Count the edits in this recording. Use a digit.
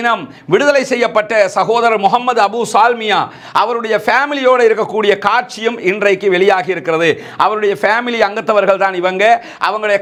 0